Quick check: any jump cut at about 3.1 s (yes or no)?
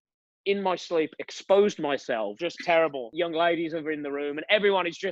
yes